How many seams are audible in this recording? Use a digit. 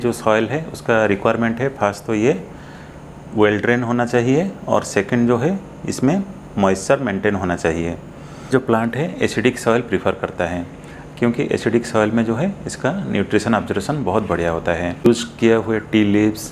2